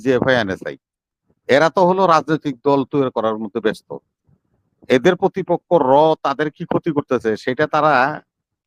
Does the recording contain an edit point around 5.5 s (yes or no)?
no